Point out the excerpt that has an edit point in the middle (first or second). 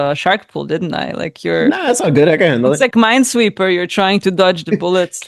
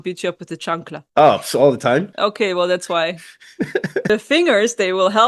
second